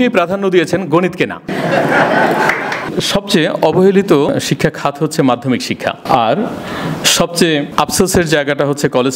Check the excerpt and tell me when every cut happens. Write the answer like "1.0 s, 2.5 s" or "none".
1.4 s, 2.8 s, 4.3 s, 6.0 s, 7.7 s